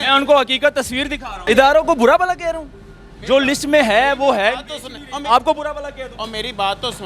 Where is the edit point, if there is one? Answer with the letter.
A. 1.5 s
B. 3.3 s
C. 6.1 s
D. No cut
A